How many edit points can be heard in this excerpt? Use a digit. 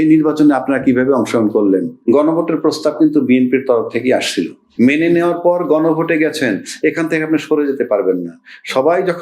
2